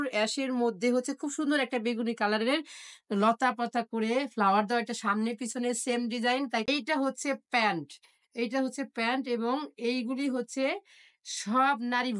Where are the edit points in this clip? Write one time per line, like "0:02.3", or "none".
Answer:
0:06.7